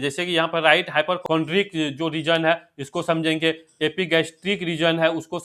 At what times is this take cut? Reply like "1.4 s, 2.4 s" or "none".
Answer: 1.2 s